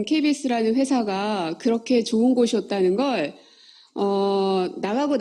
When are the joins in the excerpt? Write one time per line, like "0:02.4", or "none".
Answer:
0:01.4